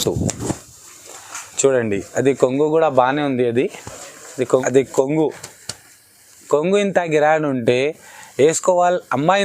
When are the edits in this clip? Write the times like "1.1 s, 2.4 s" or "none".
4.6 s